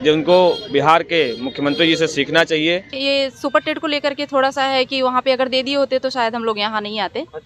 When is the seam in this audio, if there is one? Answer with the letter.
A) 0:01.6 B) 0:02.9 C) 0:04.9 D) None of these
B